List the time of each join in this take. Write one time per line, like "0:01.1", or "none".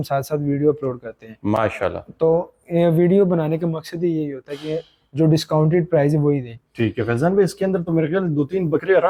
none

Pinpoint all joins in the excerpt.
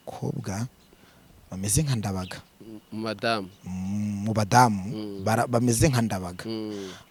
none

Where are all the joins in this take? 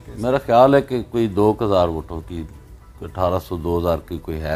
none

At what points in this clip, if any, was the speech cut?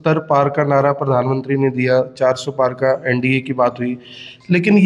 none

